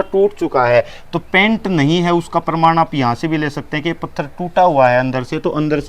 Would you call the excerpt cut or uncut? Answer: uncut